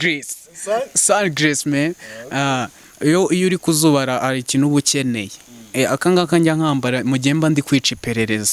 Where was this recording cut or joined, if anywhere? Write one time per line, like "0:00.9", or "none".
none